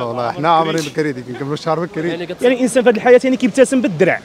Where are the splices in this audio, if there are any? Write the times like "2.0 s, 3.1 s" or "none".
2.2 s